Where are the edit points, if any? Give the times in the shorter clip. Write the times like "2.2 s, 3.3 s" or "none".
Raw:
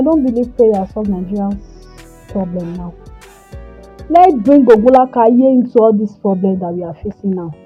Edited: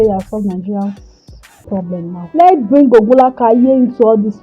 2.2 s